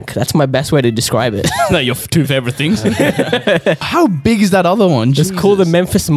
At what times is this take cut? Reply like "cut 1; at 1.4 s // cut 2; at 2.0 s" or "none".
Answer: cut 1; at 3.9 s